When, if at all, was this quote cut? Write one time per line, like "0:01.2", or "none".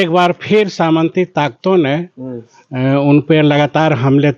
none